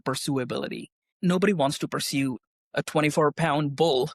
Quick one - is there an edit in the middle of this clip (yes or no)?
yes